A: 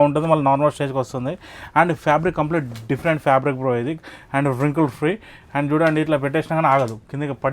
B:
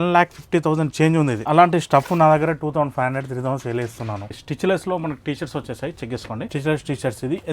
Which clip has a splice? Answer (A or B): B